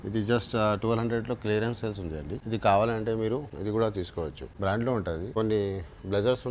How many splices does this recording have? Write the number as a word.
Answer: four